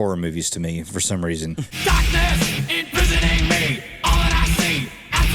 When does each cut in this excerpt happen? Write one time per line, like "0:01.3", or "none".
0:01.7